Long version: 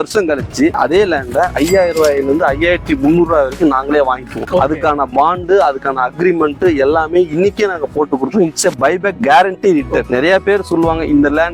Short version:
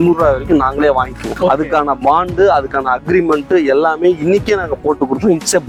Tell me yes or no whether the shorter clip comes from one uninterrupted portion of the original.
yes